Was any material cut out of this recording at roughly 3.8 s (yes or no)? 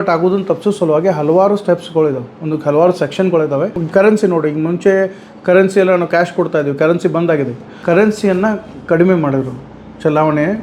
yes